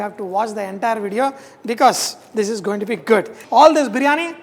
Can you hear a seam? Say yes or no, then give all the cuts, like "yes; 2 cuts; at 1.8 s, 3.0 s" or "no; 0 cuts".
yes; 1 cut; at 3.4 s